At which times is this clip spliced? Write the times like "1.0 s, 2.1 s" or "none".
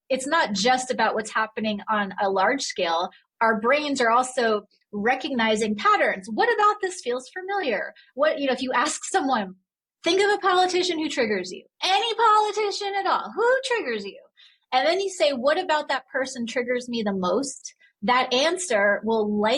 9.9 s